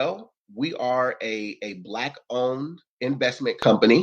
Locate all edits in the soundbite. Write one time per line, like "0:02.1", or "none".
0:02.8